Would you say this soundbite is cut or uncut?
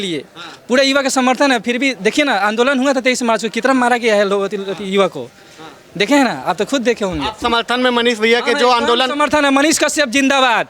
uncut